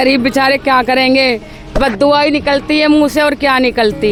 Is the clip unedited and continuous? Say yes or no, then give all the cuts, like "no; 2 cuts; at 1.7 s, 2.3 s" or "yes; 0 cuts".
yes; 0 cuts